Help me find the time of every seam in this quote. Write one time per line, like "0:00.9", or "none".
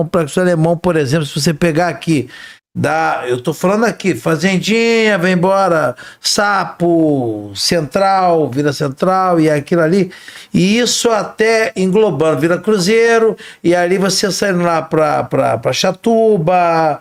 none